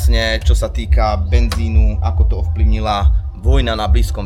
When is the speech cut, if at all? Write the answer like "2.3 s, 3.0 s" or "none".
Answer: none